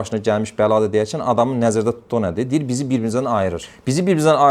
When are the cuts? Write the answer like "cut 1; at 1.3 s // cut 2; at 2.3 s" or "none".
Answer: none

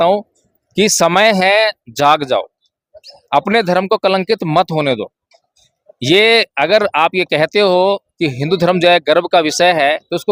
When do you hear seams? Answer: none

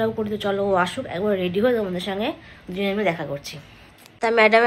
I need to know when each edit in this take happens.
none

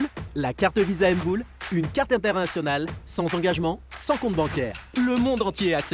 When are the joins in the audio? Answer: none

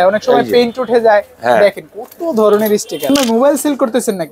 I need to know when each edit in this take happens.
cut 1; at 3.1 s

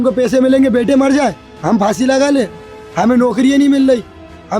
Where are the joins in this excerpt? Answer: none

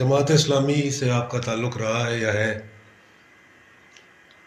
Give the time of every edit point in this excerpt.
none

